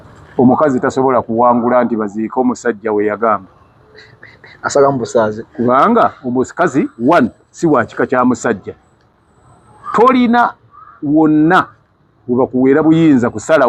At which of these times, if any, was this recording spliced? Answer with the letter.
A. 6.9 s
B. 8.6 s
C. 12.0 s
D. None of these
D